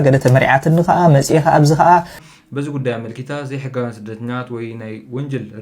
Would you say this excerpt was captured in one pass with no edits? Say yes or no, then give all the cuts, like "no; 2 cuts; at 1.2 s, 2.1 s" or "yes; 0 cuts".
no; 1 cut; at 2.2 s